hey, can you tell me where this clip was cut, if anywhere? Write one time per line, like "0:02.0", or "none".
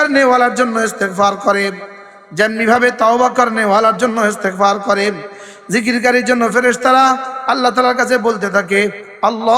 none